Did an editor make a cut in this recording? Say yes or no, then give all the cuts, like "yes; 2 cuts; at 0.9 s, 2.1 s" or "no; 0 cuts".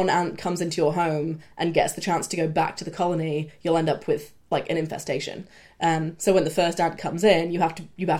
no; 0 cuts